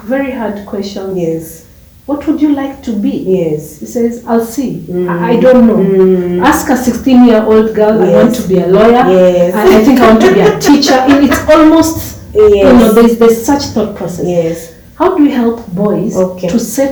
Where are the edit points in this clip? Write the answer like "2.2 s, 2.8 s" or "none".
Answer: none